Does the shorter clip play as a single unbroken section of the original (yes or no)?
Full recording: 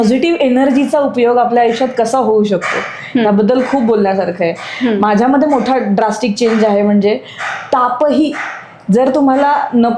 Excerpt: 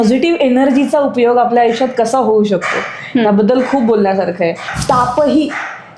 no